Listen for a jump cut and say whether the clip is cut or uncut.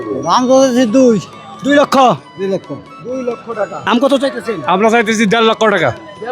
cut